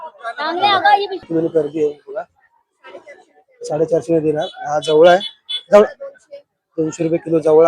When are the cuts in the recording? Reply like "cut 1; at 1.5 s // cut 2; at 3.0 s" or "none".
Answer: cut 1; at 1.3 s